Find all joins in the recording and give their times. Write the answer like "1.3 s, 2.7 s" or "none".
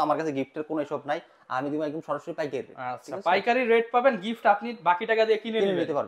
none